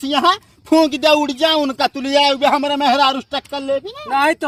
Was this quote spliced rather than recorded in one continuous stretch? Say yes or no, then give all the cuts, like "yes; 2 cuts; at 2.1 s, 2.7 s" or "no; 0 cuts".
no; 0 cuts